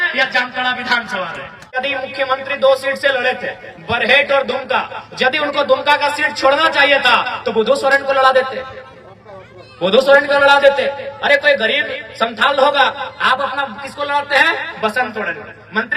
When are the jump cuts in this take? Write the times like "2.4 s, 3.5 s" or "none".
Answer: 1.8 s

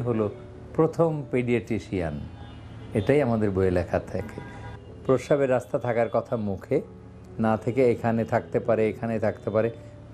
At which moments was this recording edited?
4.6 s

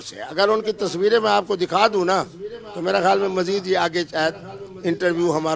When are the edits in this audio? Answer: none

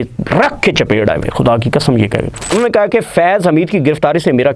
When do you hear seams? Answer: 2.5 s

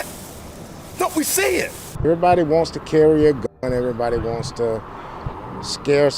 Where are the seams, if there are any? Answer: 2.0 s

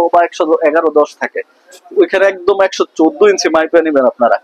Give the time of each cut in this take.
none

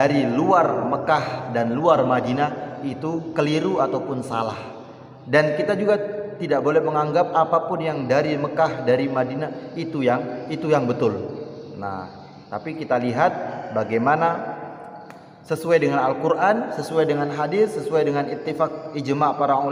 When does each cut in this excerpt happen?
none

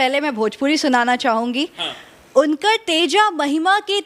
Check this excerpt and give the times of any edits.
none

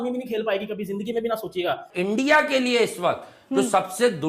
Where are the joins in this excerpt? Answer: 1.9 s

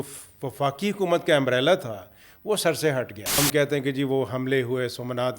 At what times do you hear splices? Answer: 3.4 s

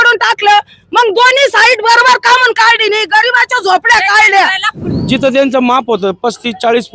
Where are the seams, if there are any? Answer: 4.8 s

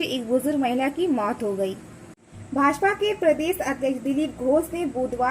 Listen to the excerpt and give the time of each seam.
2.3 s

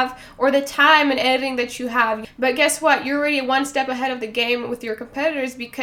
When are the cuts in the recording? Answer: none

